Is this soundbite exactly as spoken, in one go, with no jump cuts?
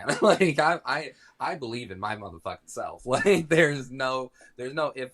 yes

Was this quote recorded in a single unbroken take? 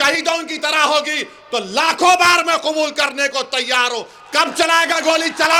yes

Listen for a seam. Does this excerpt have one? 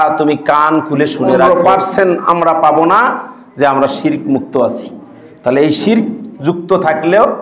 yes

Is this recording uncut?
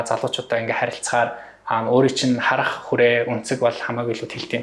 yes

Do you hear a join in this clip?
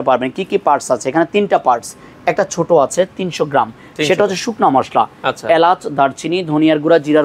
no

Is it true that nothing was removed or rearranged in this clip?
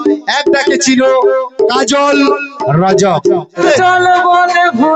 no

